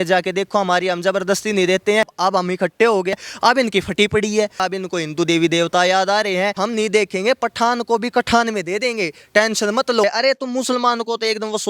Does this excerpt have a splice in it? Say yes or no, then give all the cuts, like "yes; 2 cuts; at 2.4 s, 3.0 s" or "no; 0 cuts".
yes; 5 cuts; at 2.1 s, 3.1 s, 4.6 s, 6.6 s, 10.0 s